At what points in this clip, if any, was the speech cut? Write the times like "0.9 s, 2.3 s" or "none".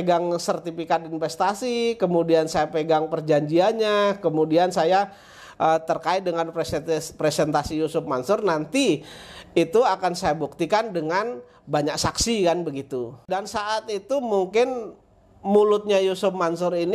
13.4 s